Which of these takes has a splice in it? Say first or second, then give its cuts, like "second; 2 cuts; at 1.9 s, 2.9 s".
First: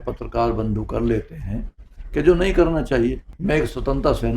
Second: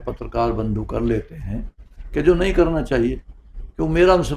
first; 1 cut; at 3.3 s